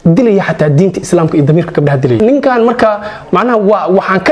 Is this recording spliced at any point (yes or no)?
yes